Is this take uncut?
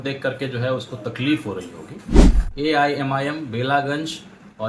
no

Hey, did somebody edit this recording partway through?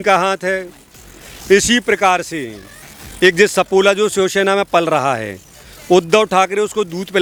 no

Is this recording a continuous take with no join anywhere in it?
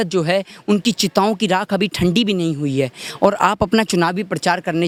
yes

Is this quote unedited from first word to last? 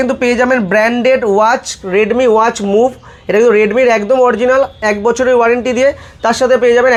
yes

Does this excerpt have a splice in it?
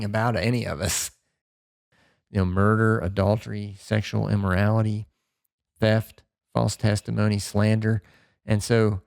yes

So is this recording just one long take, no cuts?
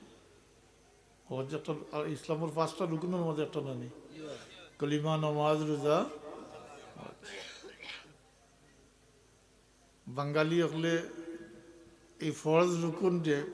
yes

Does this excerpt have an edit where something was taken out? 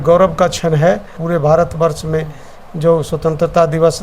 yes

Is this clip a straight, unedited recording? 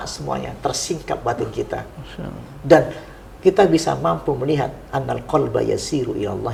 yes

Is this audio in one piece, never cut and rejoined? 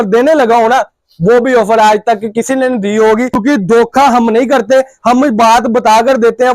no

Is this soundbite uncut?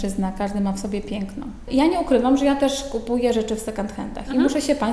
no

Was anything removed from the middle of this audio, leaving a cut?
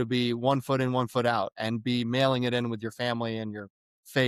no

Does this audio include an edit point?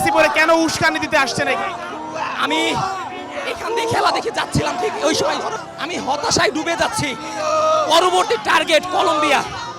no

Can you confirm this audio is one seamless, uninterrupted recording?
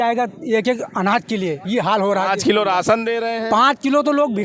yes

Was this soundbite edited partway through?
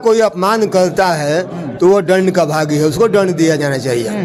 no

